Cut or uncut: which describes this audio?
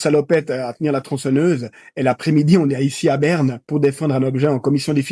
uncut